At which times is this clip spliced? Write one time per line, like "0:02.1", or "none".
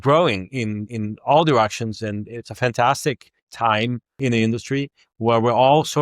0:00.9